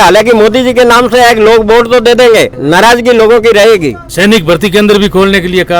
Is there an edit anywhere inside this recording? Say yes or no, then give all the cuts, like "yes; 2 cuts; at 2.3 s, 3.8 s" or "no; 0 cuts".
yes; 2 cuts; at 2.6 s, 4.0 s